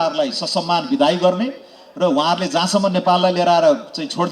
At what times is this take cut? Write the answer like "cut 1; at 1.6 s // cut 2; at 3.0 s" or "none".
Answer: none

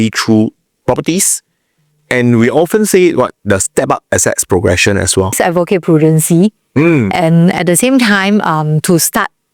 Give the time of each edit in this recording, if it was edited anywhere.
cut 1; at 5.4 s

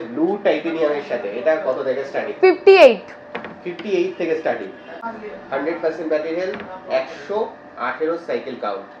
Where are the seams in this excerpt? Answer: cut 1; at 5.0 s

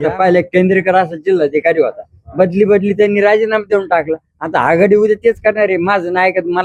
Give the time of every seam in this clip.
none

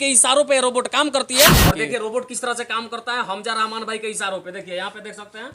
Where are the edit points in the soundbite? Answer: cut 1; at 1.5 s

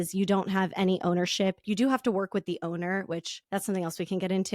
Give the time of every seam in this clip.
cut 1; at 1.6 s

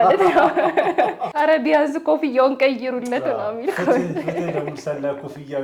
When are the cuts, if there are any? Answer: cut 1; at 1.2 s

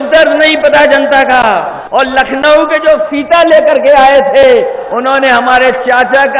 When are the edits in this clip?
cut 1; at 1.8 s

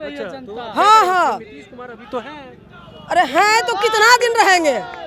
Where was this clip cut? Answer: none

